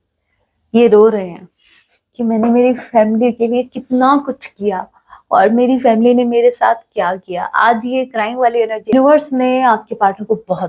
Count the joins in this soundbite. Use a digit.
1